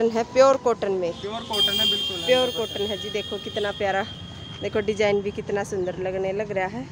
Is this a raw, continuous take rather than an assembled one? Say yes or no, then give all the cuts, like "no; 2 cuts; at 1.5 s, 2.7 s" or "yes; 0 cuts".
yes; 0 cuts